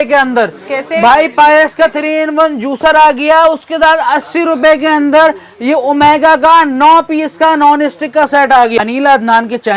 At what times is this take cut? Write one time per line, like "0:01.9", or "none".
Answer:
0:08.9